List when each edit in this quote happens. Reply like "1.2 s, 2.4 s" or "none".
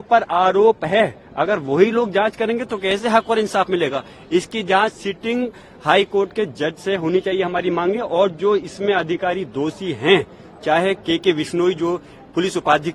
none